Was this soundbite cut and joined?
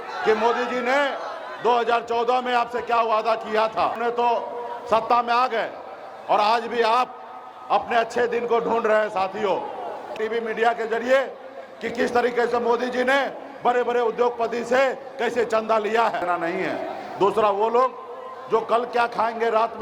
yes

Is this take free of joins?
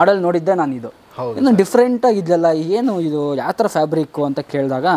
yes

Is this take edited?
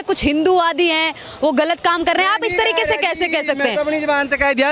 no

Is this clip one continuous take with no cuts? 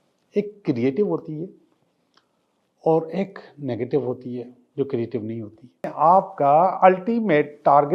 no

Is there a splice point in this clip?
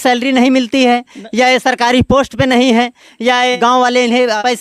no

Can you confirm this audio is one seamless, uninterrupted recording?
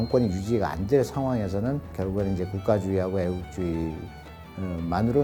yes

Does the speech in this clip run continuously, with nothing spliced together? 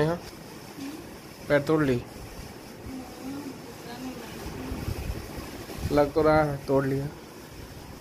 yes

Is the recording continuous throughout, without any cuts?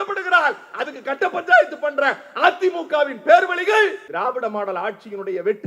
no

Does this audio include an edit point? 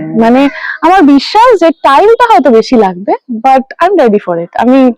no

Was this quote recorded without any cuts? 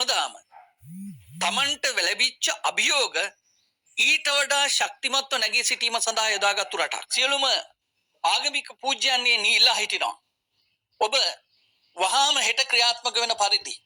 no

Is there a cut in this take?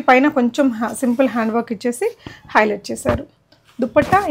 no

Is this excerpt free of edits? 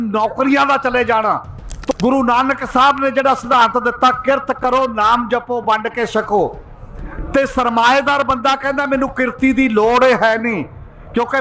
no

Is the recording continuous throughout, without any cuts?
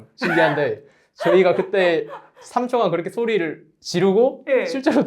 yes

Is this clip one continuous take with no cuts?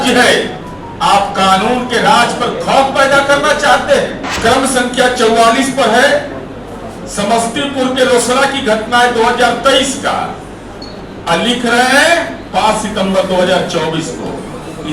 no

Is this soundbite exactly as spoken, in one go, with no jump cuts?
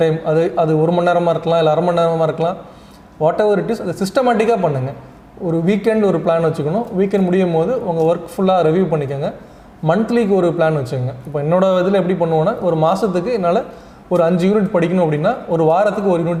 yes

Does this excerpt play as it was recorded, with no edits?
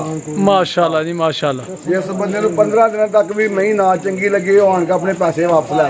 yes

